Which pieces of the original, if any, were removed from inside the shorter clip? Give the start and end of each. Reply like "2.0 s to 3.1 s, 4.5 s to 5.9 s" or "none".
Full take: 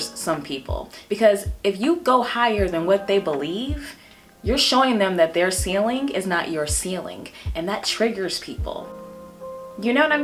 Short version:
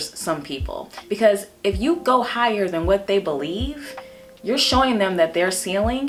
none